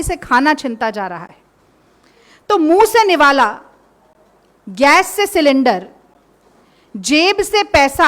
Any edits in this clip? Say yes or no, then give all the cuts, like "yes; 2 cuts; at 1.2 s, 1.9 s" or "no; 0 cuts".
no; 0 cuts